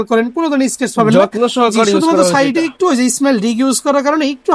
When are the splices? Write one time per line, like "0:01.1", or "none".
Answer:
none